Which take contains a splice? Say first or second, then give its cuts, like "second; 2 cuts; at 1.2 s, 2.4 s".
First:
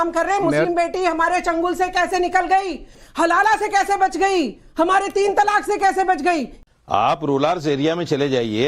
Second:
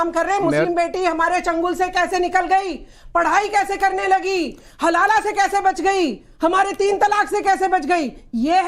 first; 2 cuts; at 3.0 s, 6.6 s